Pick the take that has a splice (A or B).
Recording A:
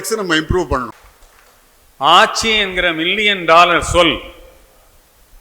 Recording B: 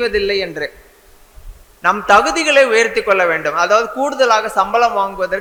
A